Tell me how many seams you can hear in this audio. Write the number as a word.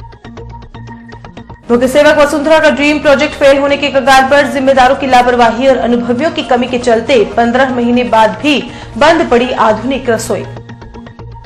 one